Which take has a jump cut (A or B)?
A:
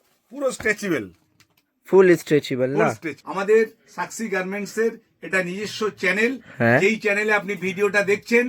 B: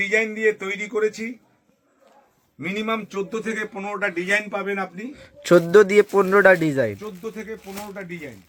A